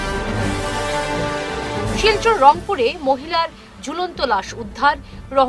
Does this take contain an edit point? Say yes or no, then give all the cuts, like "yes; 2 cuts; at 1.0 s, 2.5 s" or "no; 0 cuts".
yes; 1 cut; at 1.6 s